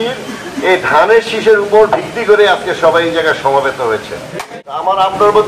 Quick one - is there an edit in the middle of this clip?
yes; 1 cut; at 4.4 s

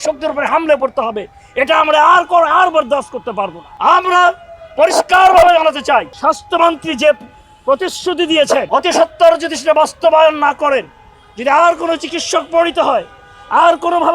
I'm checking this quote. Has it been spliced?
yes; 3 cuts; at 3.6 s, 6.1 s, 8.7 s

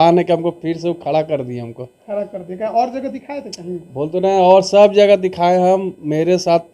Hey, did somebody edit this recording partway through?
no; 0 cuts

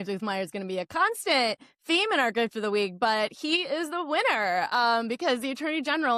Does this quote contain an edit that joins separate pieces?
no; 0 cuts

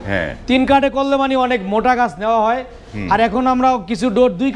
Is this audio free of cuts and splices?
yes; 0 cuts

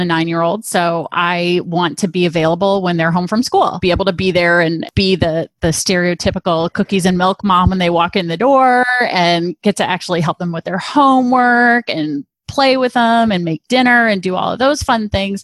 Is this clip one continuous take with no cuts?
no; 2 cuts; at 3.8 s, 4.9 s

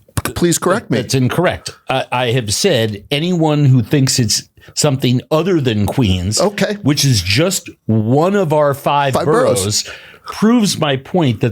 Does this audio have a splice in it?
no; 0 cuts

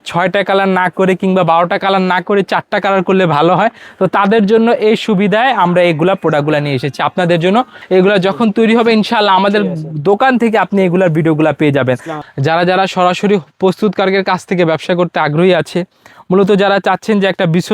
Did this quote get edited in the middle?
yes; 2 cuts; at 7.8 s, 12.1 s

